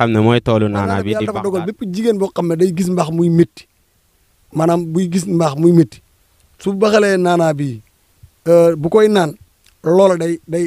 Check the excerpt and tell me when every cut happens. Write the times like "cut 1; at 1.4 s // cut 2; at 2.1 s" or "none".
cut 1; at 1.2 s